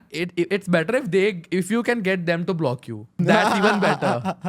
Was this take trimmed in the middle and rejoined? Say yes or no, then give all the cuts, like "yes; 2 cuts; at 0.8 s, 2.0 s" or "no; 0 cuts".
yes; 1 cut; at 3.2 s